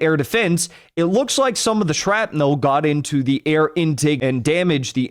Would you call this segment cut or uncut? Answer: cut